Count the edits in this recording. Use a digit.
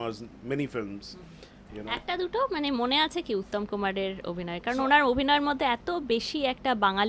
0